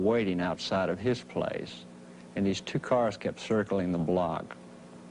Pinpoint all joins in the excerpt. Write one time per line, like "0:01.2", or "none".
0:02.8